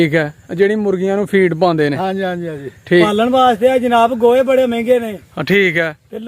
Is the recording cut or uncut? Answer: cut